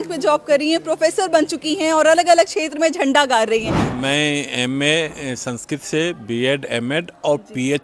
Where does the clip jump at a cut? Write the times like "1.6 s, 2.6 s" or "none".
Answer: 3.9 s